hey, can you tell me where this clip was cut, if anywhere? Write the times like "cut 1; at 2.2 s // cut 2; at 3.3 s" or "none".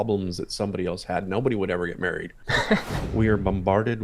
cut 1; at 2.5 s